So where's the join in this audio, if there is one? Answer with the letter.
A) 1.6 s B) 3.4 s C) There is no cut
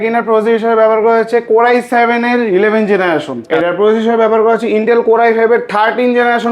B